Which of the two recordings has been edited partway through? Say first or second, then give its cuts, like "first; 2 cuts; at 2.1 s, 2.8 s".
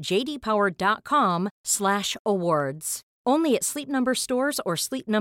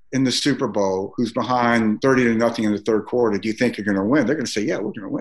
second; 1 cut; at 2.0 s